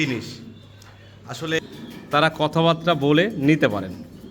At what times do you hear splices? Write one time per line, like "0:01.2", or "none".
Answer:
0:01.6